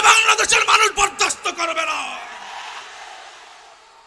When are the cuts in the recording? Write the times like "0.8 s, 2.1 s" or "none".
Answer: none